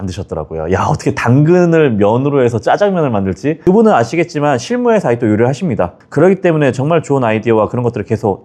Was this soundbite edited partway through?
no; 0 cuts

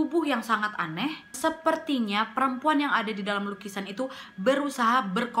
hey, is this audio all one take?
no; 1 cut; at 1.3 s

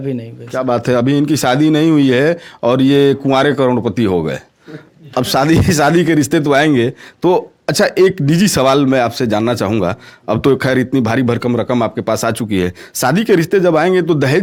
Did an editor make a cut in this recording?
no; 0 cuts

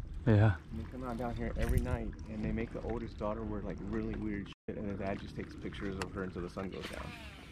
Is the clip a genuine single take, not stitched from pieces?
yes; 0 cuts

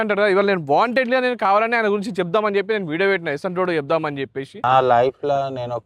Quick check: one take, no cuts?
no; 1 cut; at 4.5 s

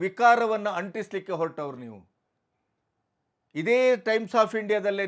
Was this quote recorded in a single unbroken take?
yes; 0 cuts

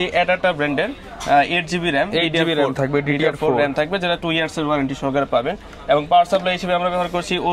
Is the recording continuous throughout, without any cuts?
yes; 0 cuts

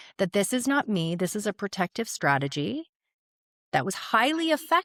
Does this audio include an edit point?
no; 0 cuts

